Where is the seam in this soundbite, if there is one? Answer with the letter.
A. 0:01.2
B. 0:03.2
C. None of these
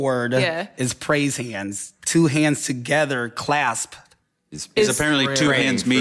C